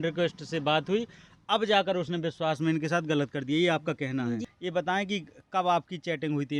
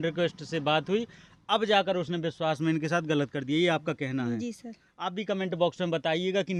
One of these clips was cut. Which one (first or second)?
first